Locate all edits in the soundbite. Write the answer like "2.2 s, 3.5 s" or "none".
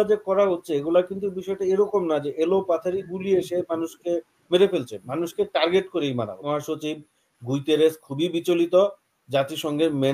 6.5 s